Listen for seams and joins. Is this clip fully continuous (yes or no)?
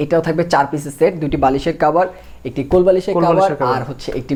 yes